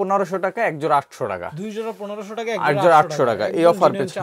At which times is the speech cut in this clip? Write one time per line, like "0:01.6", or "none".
none